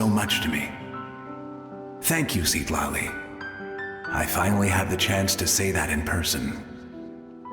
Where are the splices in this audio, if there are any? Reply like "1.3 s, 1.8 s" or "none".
6.6 s